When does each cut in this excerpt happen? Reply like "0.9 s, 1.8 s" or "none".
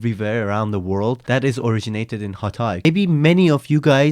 1.2 s, 2.8 s